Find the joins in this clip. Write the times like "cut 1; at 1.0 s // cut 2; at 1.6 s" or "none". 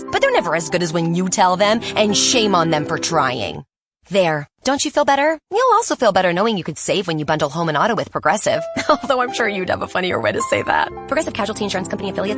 none